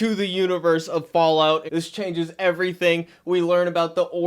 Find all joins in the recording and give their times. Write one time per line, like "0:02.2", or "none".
0:01.7